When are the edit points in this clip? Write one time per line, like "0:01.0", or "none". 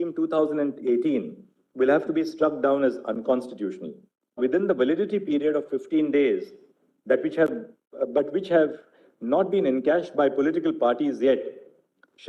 0:04.4